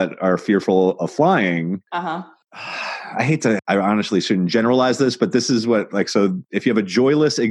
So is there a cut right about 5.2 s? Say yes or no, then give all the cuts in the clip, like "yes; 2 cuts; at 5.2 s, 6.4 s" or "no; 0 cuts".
no; 1 cut; at 3.6 s